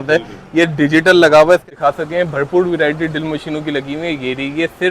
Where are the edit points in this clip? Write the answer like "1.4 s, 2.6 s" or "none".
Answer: 1.7 s